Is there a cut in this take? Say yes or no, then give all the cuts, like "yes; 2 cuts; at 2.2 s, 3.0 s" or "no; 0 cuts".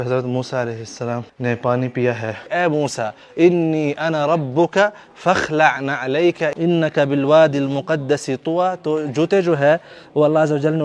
yes; 3 cuts; at 1.3 s, 2.5 s, 6.5 s